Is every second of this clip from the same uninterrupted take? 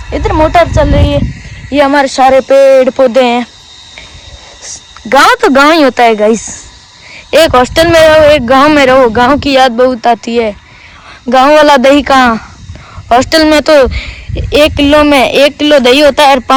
yes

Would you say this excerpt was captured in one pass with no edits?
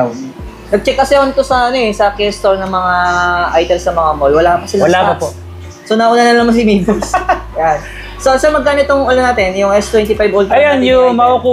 yes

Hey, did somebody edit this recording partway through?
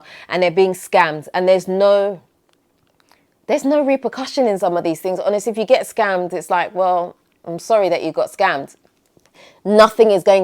no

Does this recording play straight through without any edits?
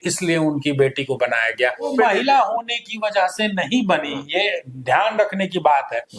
no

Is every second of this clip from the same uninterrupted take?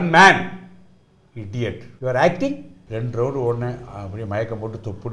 no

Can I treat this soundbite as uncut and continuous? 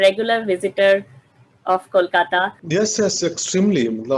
no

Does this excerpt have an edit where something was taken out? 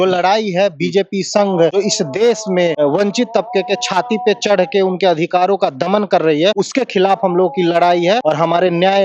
yes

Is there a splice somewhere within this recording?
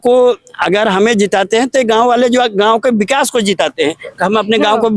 no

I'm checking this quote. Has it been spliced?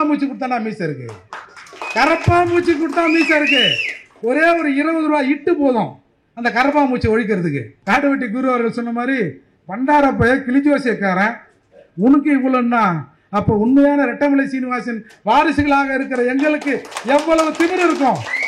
yes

